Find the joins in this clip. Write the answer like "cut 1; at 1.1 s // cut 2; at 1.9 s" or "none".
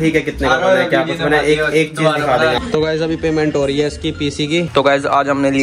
cut 1; at 2.6 s // cut 2; at 4.7 s